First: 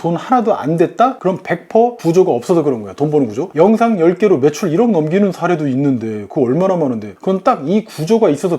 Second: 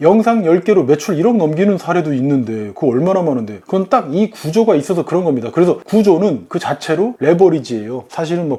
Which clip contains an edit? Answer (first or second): first